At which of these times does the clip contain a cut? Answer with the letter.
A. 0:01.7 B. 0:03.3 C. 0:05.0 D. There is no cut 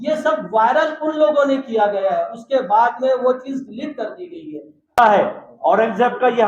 C